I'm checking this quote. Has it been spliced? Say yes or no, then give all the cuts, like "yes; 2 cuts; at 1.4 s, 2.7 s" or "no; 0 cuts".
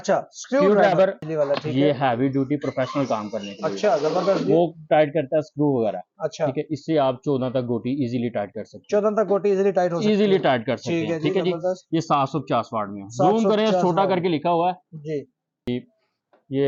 yes; 2 cuts; at 1.2 s, 15.7 s